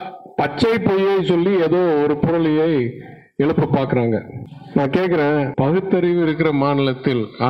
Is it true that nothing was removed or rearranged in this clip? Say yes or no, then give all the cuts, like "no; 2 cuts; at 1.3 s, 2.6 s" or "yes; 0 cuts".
yes; 0 cuts